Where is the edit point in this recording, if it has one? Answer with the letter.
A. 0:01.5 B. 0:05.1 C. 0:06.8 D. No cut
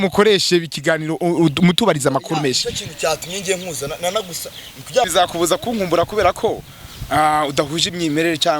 B